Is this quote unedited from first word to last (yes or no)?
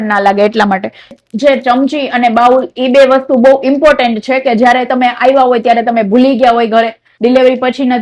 no